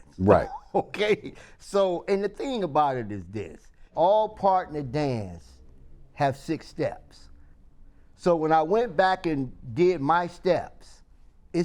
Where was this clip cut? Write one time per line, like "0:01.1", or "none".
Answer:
0:03.9